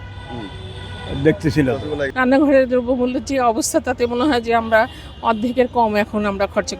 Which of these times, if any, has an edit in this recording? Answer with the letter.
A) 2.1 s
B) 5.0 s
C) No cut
A